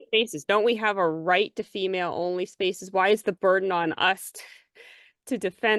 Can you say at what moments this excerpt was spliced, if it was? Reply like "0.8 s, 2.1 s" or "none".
none